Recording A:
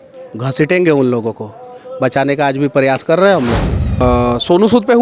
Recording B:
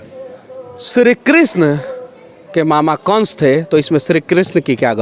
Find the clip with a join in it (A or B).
A